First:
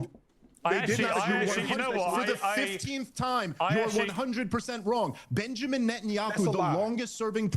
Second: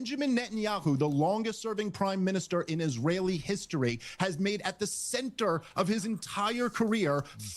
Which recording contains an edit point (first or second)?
first